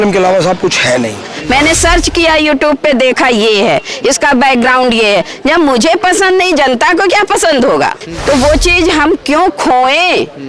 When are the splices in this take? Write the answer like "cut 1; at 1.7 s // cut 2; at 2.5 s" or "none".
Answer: cut 1; at 1.3 s // cut 2; at 8.1 s